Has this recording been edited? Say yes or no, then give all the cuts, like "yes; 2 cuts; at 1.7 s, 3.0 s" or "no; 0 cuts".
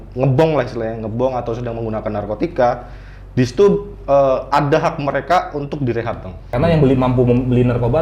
yes; 1 cut; at 6.5 s